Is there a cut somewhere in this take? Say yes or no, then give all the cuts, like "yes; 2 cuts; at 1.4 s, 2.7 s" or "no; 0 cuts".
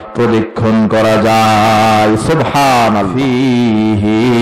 yes; 1 cut; at 3.1 s